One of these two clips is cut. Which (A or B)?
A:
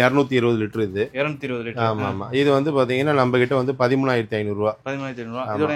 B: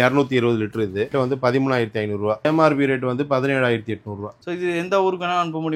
B